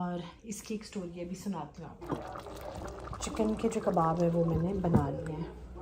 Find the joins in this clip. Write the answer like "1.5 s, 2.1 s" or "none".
1.9 s